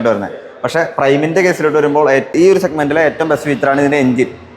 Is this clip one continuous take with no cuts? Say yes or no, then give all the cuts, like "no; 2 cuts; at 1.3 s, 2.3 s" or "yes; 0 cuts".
no; 1 cut; at 2.3 s